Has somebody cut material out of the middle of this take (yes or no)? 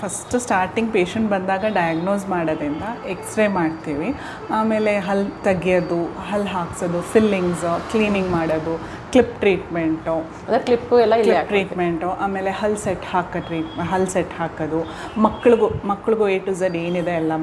no